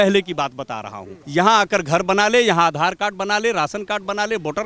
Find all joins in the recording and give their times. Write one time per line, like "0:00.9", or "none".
0:01.2